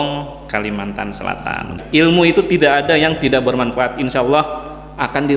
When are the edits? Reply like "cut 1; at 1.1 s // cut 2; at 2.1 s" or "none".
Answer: cut 1; at 1.8 s